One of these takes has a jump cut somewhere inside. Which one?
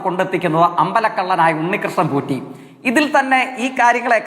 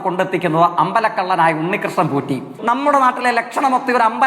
second; 1 cut; at 2.5 s

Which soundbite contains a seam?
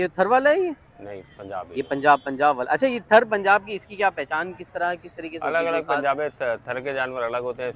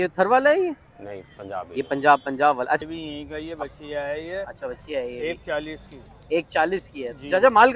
second; 1 cut; at 2.8 s

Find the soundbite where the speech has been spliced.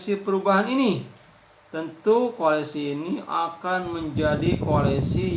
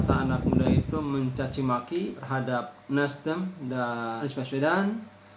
second; 2 cuts; at 2.2 s, 4.2 s

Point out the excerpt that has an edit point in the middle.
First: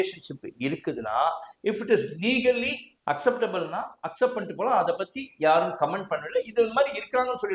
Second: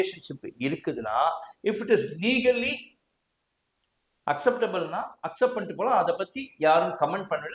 first; 1 cut; at 2.9 s

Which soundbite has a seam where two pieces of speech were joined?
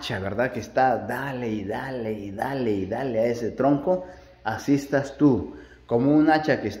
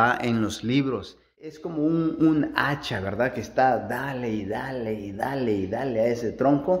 second; 1 cut; at 1.6 s

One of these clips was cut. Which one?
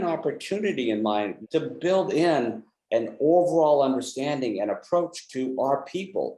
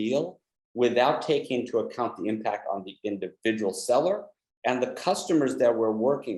first; 1 cut; at 1.4 s

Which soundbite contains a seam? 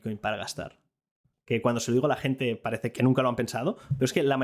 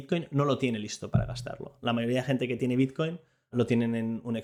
first; 2 cuts; at 1.3 s, 2.9 s

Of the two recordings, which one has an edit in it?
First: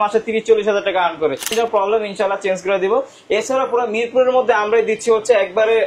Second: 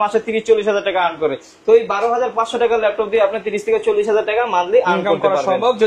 first; 1 cut; at 1.5 s

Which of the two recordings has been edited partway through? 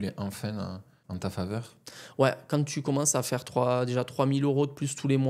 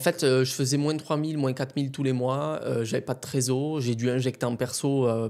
first; 1 cut; at 0.9 s

